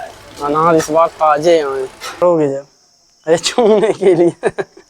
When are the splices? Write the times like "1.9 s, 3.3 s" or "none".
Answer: 2.2 s